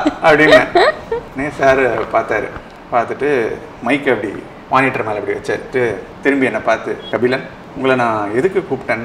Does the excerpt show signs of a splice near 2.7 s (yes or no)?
no